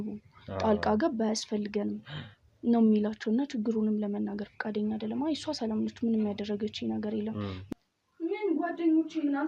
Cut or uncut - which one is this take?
cut